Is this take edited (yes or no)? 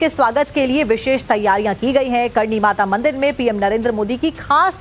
yes